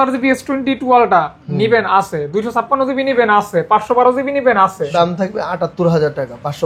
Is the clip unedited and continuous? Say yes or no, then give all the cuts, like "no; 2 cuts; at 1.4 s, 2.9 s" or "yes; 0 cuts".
no; 1 cut; at 4.9 s